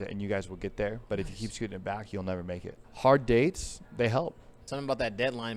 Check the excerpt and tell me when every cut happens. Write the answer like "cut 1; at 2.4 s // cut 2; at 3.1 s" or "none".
cut 1; at 2.8 s // cut 2; at 4.7 s